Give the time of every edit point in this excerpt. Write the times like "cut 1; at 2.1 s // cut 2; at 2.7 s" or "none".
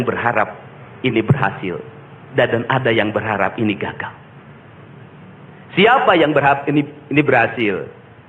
none